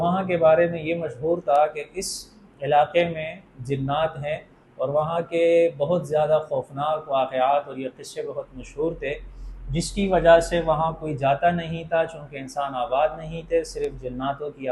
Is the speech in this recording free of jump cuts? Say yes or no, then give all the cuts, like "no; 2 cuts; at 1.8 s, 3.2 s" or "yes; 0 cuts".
yes; 0 cuts